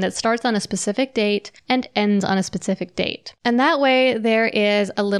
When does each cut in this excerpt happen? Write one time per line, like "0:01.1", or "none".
0:01.5
0:03.2